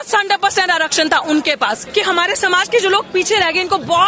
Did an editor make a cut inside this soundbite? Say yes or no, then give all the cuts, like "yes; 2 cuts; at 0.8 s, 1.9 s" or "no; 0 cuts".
yes; 1 cut; at 1.8 s